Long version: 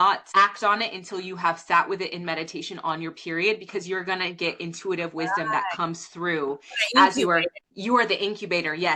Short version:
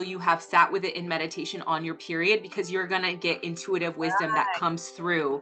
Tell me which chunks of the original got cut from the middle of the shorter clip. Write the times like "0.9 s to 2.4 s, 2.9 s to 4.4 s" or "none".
none